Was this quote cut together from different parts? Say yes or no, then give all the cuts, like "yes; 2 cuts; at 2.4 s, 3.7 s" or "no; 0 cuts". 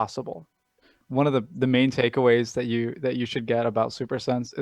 yes; 1 cut; at 1.0 s